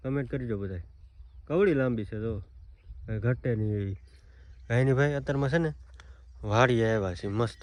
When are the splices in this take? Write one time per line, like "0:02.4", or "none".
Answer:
none